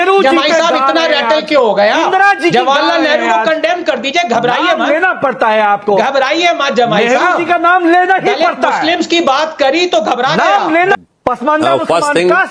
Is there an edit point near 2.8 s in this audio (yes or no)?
no